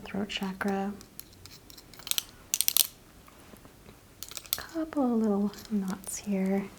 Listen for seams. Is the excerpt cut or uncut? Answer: uncut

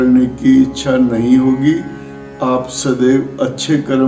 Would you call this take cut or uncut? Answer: uncut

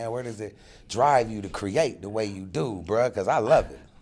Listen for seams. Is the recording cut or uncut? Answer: uncut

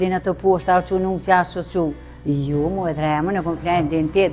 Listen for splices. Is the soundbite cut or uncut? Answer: uncut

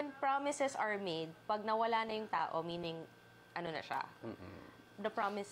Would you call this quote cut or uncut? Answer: uncut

